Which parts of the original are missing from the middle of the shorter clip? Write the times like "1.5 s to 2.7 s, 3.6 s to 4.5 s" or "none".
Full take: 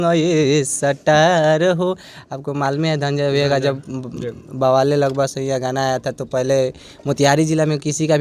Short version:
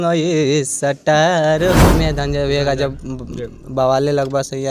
1.9 s to 2.8 s